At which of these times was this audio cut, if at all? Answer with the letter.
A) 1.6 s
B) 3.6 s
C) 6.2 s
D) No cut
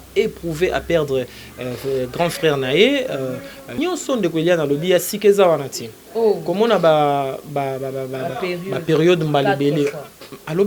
B